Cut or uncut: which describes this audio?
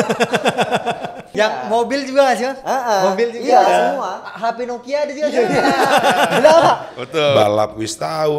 cut